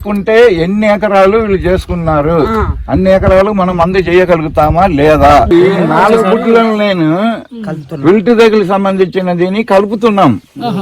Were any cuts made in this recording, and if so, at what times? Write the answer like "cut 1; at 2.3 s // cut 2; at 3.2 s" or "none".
cut 1; at 5.5 s